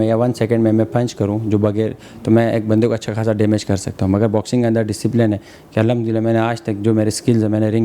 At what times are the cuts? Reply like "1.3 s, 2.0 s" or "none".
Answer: none